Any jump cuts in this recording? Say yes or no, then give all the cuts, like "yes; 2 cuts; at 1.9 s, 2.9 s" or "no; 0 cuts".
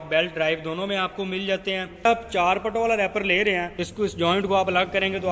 yes; 2 cuts; at 2.1 s, 3.8 s